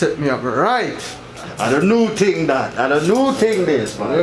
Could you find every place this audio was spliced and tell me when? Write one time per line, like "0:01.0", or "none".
0:01.5

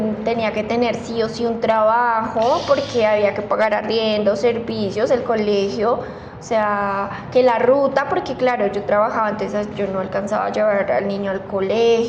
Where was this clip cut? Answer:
none

